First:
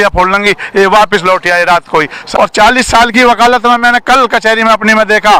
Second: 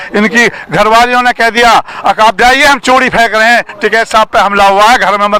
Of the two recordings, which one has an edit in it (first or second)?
first